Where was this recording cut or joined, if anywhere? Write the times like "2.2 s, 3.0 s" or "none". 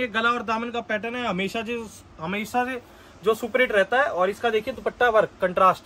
none